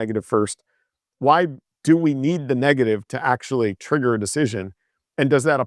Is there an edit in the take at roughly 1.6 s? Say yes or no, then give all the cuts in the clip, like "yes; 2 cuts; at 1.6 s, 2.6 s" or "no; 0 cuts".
no; 0 cuts